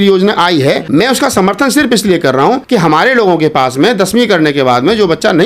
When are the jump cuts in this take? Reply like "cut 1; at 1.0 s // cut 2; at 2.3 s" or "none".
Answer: cut 1; at 0.8 s // cut 2; at 2.6 s